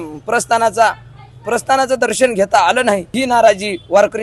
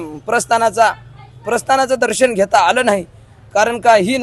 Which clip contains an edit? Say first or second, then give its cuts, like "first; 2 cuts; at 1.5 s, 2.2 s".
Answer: first; 1 cut; at 3.2 s